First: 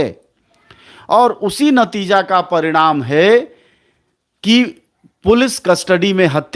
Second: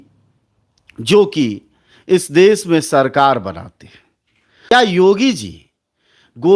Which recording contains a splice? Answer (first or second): second